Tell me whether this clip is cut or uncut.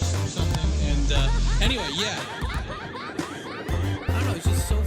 cut